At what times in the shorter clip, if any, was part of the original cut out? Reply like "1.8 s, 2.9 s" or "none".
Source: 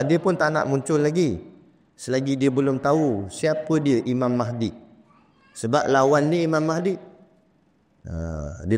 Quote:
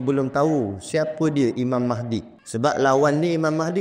2.4 s